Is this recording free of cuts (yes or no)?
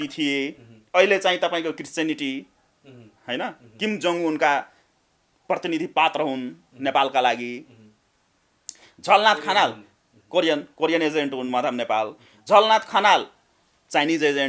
yes